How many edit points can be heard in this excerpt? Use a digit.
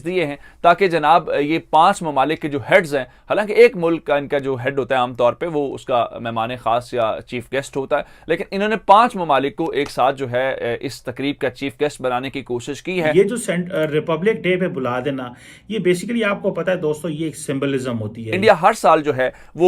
2